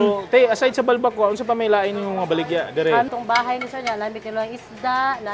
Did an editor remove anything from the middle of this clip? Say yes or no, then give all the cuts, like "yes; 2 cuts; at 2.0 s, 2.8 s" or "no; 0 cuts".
yes; 1 cut; at 3.1 s